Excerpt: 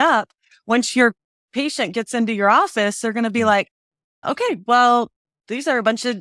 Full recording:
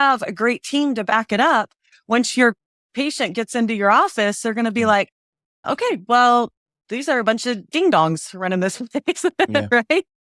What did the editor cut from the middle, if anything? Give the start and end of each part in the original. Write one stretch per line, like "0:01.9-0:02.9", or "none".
none